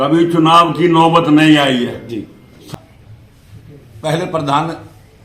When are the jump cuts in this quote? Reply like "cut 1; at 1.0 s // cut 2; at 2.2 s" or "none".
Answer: cut 1; at 2.6 s